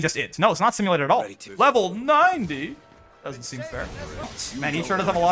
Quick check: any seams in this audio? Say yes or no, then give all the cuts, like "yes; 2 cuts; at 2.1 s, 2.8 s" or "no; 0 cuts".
yes; 2 cuts; at 1.4 s, 4.4 s